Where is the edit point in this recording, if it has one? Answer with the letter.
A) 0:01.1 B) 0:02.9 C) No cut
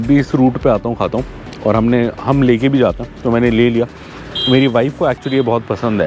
C